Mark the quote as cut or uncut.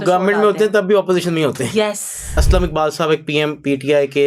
cut